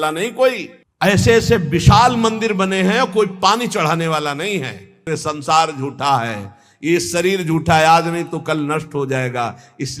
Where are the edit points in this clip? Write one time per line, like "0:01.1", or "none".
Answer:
0:05.0